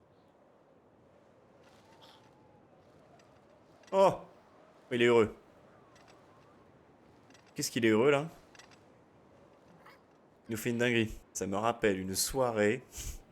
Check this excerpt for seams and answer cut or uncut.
cut